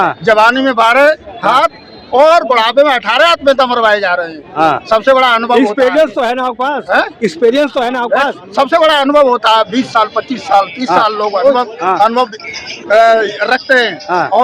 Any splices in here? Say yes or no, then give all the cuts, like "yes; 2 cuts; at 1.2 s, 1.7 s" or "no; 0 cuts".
no; 0 cuts